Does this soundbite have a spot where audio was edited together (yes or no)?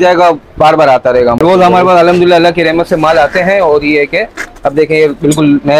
yes